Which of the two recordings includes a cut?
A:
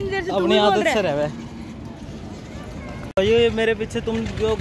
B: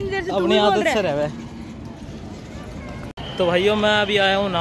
B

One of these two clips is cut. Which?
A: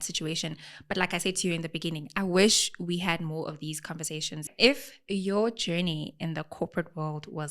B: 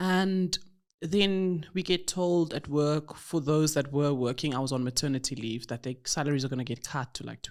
A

